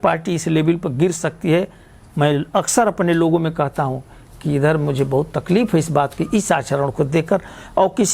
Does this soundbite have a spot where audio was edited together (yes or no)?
no